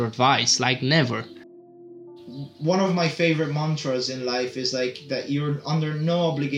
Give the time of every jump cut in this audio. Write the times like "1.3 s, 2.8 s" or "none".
1.8 s